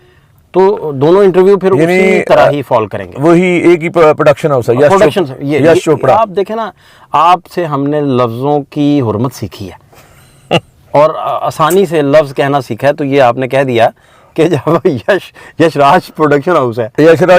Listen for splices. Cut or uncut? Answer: uncut